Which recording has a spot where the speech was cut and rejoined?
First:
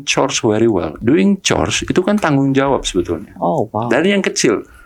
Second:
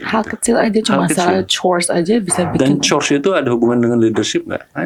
first; 1 cut; at 0.9 s

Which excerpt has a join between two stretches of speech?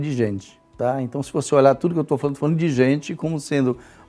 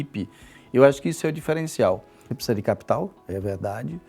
second; 1 cut; at 2.2 s

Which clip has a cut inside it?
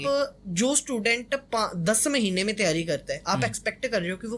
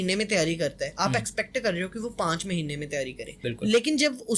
second; 1 cut; at 3.3 s

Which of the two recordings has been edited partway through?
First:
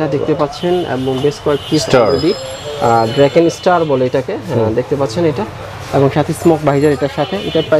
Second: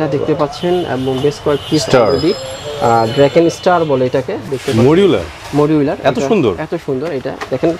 second; 1 cut; at 4.4 s

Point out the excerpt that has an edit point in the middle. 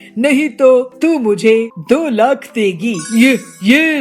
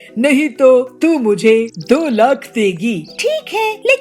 first; 1 cut; at 3.0 s

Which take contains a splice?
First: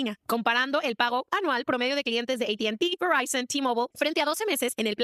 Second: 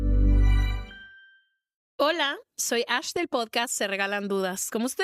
second; 1 cut; at 1.8 s

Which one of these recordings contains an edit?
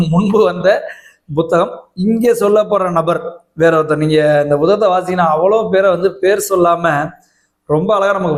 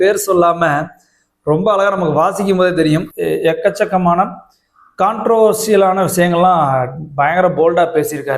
second; 1 cut; at 3.1 s

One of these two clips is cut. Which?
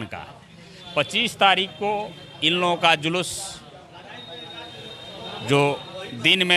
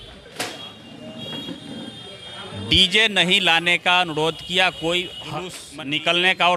second; 1 cut; at 5.6 s

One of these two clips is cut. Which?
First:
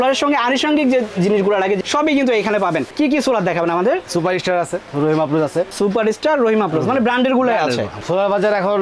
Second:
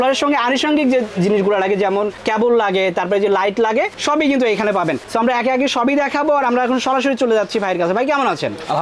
first; 5 cuts; at 1.8 s, 2.9 s, 4.8 s, 5.7 s, 7.9 s

